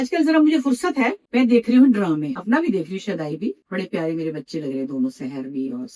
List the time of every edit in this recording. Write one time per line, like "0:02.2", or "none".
0:01.2
0:02.3
0:03.6